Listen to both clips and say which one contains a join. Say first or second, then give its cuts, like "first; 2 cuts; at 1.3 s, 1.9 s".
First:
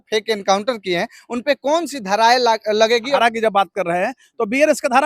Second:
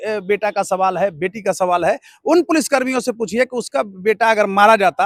first; 1 cut; at 3.2 s